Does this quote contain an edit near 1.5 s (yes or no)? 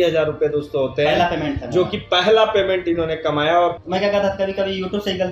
no